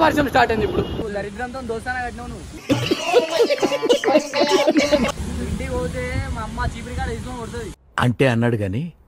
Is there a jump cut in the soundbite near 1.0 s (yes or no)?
yes